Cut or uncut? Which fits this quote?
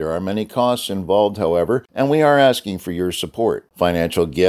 cut